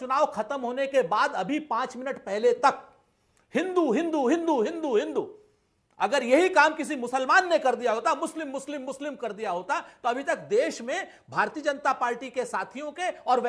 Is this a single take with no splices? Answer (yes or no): yes